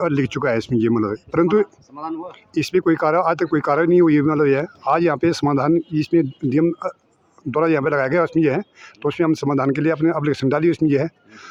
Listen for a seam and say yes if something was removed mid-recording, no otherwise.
no